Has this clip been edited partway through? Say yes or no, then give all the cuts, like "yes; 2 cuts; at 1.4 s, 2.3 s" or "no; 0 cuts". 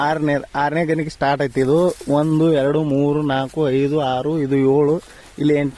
no; 0 cuts